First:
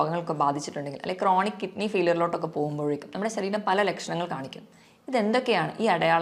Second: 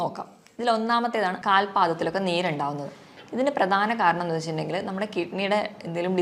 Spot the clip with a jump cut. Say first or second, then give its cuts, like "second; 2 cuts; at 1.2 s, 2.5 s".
second; 1 cut; at 1.4 s